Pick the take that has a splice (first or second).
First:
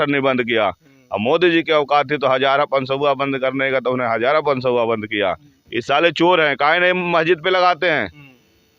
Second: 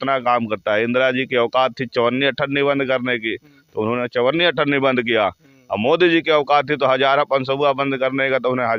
first